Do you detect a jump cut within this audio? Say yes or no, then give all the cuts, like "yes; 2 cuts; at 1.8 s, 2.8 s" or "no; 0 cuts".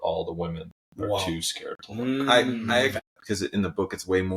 yes; 1 cut; at 2.9 s